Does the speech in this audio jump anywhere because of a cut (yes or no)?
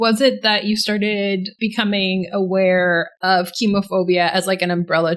yes